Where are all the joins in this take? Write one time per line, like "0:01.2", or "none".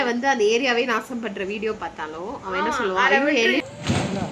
none